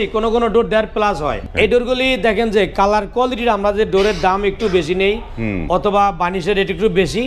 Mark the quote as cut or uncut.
cut